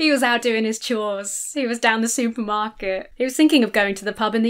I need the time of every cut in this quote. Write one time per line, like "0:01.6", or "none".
0:03.1